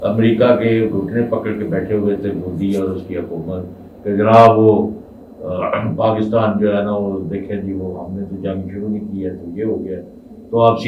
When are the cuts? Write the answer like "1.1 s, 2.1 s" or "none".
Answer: none

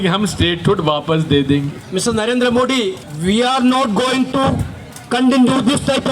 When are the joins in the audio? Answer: 1.8 s, 3.1 s

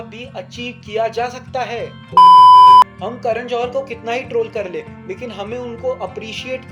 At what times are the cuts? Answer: 2.1 s

